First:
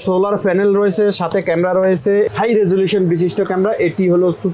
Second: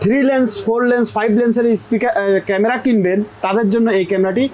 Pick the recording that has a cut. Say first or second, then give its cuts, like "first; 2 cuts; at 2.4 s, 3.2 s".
first; 1 cut; at 2.3 s